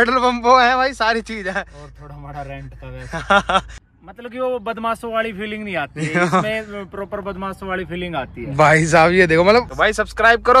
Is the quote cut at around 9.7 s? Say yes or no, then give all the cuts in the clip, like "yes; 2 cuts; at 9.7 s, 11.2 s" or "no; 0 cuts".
yes; 2 cuts; at 3.8 s, 9.7 s